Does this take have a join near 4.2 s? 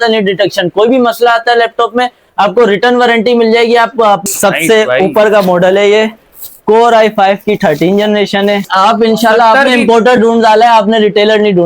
yes; 2 cuts; at 4.2 s, 8.7 s

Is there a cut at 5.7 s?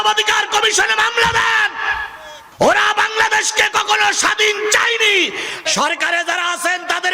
yes; 1 cut; at 5.7 s

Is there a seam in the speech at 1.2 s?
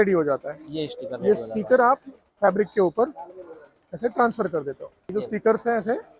no; 1 cut; at 4.9 s

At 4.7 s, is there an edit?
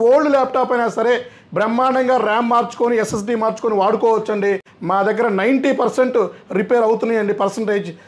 yes; 1 cut; at 4.7 s

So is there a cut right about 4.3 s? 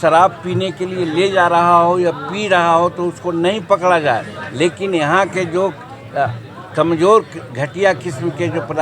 no; 0 cuts

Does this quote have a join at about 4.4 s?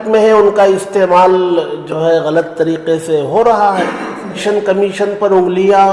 yes; 1 cut; at 4.4 s

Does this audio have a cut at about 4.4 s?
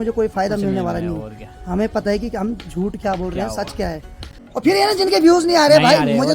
yes; 1 cut; at 4.4 s

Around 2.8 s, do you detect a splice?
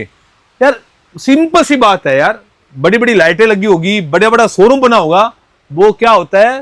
no; 0 cuts

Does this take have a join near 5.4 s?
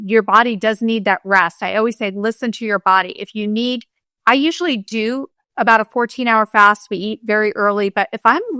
yes; 1 cut; at 5.4 s

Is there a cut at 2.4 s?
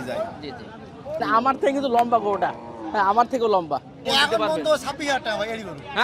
no; 2 cuts; at 1.2 s, 4.0 s

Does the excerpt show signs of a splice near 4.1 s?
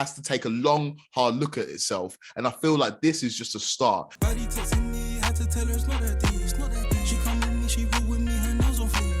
yes; 1 cut; at 4.1 s

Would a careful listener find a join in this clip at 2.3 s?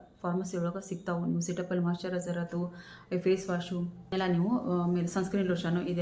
no; 1 cut; at 4.1 s

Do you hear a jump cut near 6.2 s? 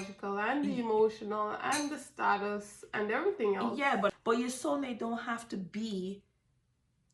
no; 1 cut; at 4.1 s

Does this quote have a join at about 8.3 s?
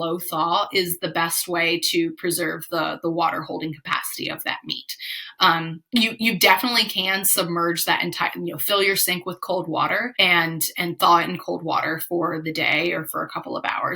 no; 1 cut; at 10.1 s

